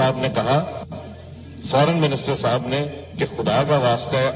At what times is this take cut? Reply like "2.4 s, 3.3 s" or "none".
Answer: 1.2 s